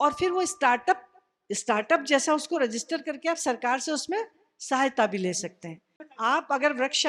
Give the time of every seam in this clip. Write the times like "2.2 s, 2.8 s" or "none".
6.0 s